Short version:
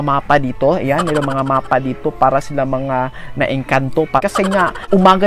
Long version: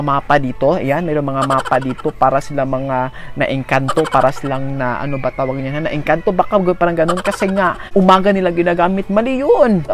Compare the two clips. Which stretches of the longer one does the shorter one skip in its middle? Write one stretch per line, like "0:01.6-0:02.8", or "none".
0:04.2-0:07.2

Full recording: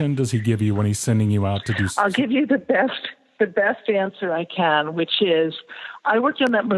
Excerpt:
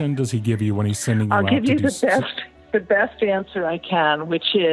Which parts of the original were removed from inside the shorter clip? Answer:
0:01.3-0:01.9

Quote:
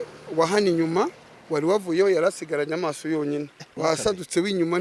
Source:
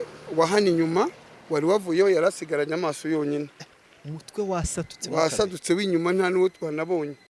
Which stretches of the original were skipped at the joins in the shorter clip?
0:03.6-0:05.0

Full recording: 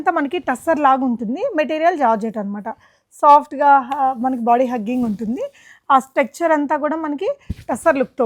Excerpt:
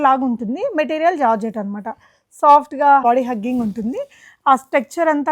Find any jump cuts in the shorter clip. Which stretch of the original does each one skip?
0:03.8-0:04.5

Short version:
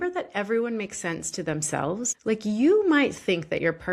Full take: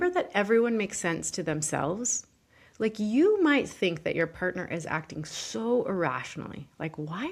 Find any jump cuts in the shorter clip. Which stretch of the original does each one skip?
0:02.1-0:02.7

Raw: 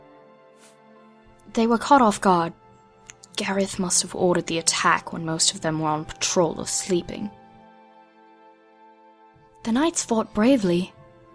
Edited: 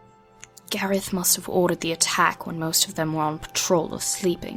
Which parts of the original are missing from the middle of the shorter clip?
none

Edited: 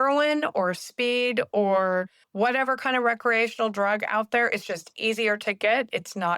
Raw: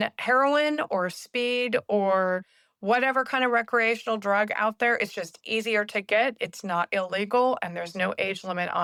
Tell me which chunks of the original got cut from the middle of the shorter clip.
0:02.6-0:02.7

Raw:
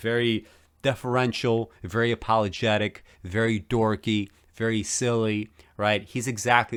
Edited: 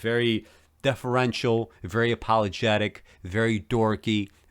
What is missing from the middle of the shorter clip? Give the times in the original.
none

